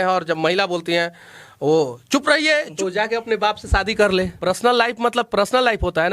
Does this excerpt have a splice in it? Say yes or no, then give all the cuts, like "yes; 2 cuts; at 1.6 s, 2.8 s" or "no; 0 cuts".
yes; 2 cuts; at 2.7 s, 4.3 s